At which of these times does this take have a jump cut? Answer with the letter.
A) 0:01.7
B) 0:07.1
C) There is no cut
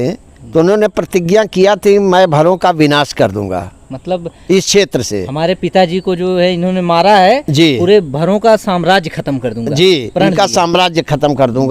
C